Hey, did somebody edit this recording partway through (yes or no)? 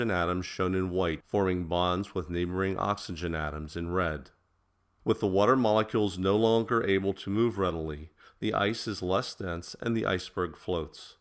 yes